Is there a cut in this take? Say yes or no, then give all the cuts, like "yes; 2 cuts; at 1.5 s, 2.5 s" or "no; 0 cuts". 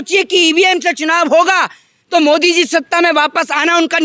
no; 0 cuts